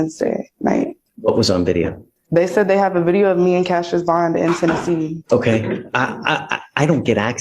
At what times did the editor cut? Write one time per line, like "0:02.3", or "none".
0:01.1
0:05.2